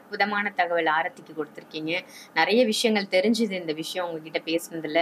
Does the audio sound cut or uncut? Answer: uncut